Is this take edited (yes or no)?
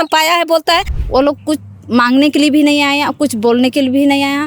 yes